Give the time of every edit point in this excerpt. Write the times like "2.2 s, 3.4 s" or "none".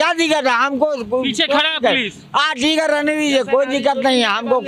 none